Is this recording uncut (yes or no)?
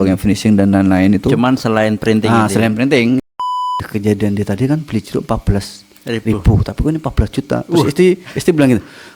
no